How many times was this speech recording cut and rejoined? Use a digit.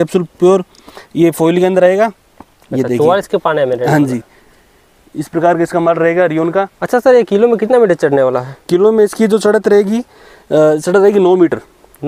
0